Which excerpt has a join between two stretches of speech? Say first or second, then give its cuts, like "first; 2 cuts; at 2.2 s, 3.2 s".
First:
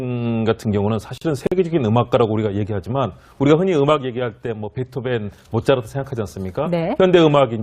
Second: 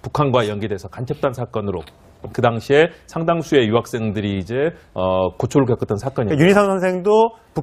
first; 1 cut; at 2.8 s